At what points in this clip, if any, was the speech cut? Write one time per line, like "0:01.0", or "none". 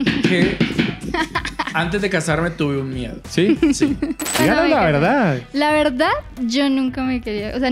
0:04.3